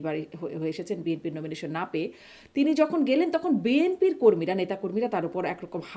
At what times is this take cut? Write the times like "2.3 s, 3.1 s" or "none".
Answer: none

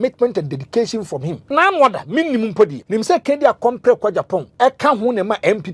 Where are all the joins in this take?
1.4 s, 2.8 s, 4.5 s

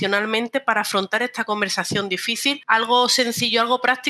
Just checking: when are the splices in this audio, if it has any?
2.6 s

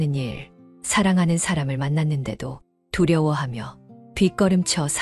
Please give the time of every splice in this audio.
none

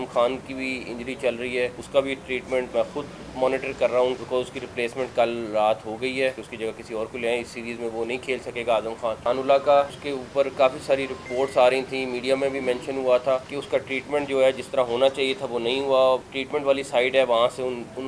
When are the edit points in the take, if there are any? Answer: 1.8 s, 2.7 s, 4.2 s, 6.5 s, 9.2 s, 10.0 s, 11.3 s, 13.5 s, 16.3 s

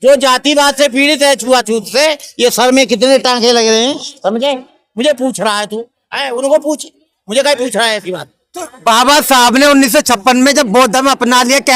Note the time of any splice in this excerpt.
none

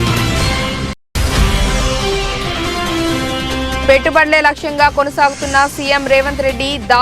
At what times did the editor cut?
1.0 s

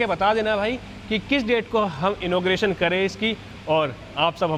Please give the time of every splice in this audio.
none

